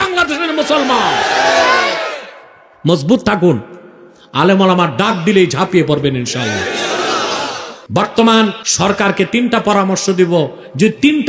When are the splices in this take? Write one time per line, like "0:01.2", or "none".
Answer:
0:07.7
0:08.6